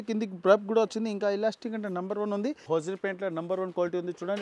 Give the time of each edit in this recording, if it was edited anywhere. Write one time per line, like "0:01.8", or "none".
0:02.7